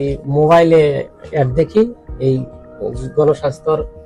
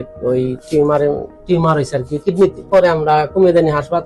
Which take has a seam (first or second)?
second